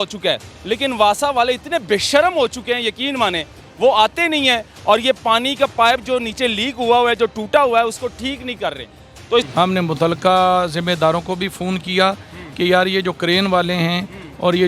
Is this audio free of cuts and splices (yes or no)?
no